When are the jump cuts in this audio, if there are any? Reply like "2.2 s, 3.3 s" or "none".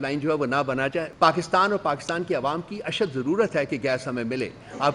1.1 s